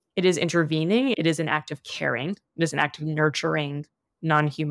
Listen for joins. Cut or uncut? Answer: cut